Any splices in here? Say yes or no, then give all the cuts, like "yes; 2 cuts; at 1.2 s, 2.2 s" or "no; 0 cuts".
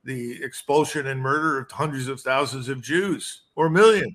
no; 0 cuts